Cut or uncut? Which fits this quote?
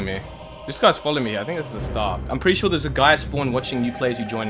cut